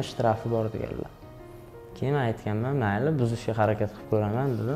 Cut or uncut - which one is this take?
uncut